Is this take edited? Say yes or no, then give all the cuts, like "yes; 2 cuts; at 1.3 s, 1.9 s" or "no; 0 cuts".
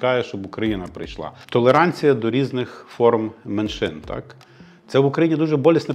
yes; 1 cut; at 1.3 s